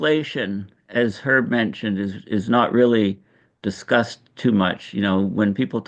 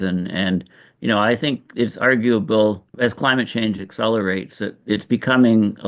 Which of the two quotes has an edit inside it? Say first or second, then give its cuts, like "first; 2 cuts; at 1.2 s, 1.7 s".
second; 1 cut; at 2.9 s